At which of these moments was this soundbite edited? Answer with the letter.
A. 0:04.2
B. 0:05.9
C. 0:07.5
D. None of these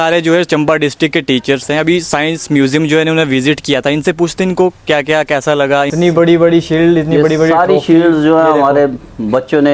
B